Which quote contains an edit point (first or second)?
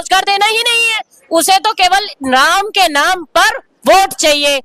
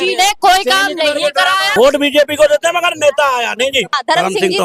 second